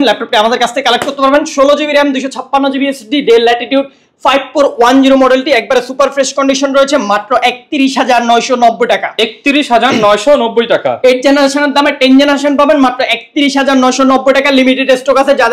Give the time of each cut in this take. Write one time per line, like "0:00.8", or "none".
none

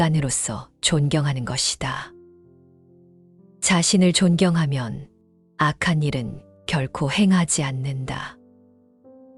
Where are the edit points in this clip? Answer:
none

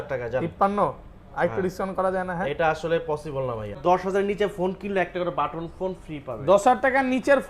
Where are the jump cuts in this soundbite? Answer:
0:03.8

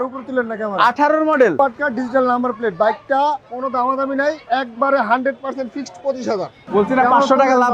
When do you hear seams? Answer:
0:01.5
0:06.6

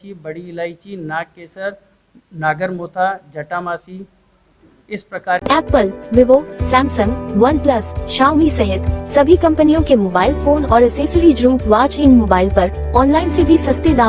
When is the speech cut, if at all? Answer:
0:05.4

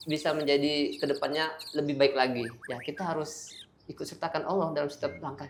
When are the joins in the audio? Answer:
none

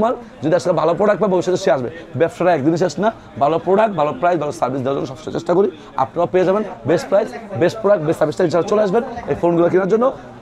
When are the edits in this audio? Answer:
none

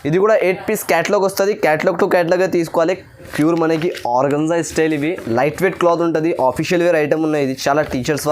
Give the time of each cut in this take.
0:03.3

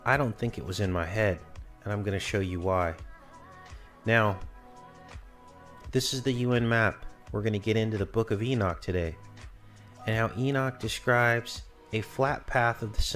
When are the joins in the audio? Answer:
none

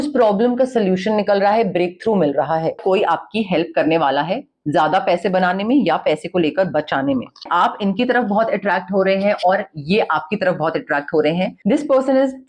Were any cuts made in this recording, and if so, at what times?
0:02.8
0:07.5
0:11.5

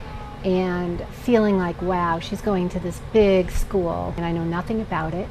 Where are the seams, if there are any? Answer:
0:04.2

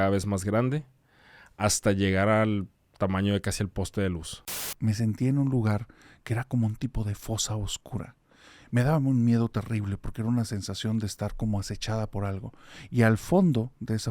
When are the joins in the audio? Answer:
0:04.6

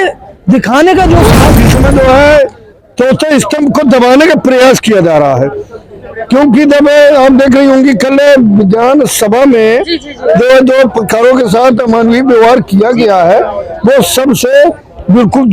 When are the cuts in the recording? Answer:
0:01.4

